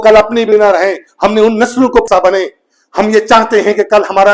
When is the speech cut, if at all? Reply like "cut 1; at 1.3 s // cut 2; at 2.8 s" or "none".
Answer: cut 1; at 2.0 s